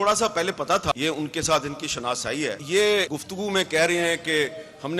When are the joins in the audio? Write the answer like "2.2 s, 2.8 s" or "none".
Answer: 0.9 s, 2.6 s, 3.2 s